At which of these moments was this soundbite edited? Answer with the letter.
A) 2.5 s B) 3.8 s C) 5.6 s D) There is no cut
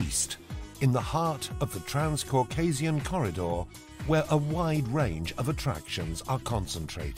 C